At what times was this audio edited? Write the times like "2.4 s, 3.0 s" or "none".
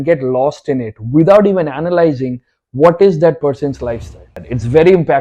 4.3 s